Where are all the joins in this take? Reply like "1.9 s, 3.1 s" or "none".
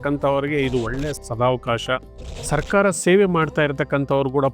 2.3 s